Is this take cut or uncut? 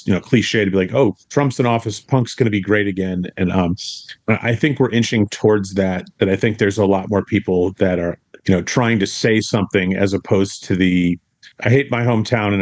uncut